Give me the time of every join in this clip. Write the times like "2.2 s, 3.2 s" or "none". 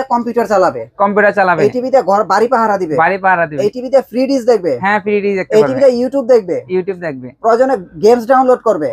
none